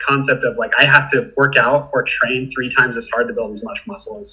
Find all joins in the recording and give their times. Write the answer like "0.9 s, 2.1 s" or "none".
none